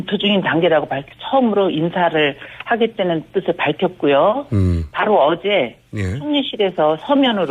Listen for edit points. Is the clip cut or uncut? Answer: cut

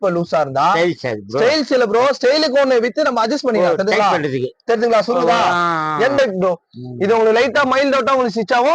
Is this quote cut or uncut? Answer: cut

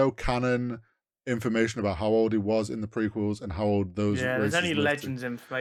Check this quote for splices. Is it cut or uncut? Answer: uncut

